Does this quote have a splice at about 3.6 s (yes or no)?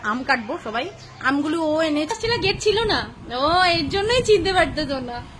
no